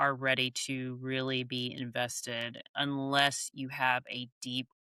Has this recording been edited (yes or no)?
no